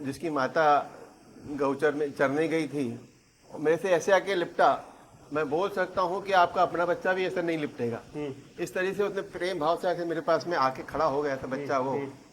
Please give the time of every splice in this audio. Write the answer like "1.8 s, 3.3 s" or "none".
none

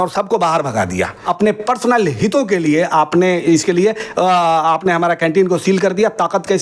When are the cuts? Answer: 1.1 s

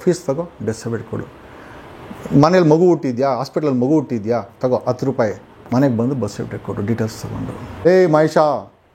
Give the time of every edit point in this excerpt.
7.7 s

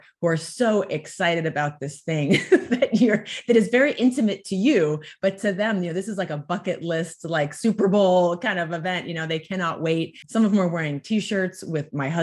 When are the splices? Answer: 10.2 s

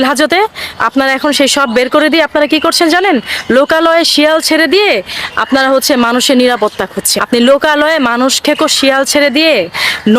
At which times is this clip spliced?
7.2 s

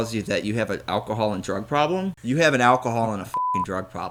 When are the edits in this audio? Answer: none

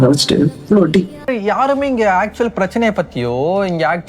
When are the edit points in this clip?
1.3 s

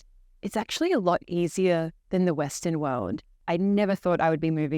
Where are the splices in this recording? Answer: 3.4 s

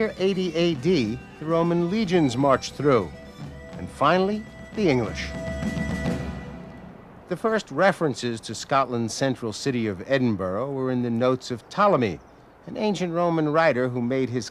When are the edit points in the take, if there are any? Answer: 11.0 s

